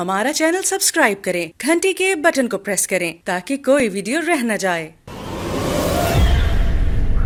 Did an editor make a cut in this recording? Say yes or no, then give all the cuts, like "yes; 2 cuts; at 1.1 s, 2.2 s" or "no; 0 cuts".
no; 0 cuts